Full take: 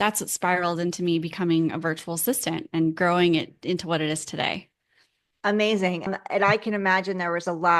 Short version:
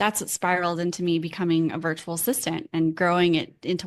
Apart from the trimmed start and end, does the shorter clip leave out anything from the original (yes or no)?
no